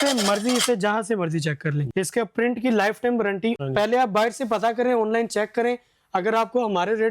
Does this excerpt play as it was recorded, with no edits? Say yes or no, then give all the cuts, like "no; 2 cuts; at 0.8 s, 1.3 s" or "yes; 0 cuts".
no; 2 cuts; at 1.8 s, 3.6 s